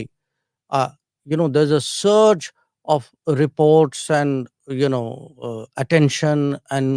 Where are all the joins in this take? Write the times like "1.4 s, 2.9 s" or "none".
none